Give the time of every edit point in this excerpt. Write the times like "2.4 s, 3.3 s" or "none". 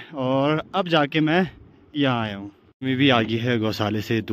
2.3 s

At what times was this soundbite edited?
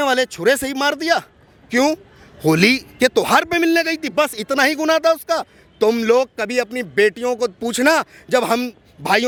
none

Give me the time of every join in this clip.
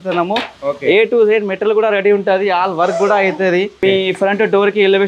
3.8 s

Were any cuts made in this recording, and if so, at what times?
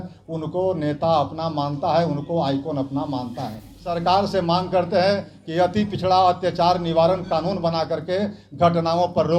3.9 s

